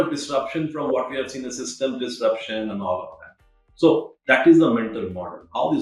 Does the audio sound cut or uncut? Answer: uncut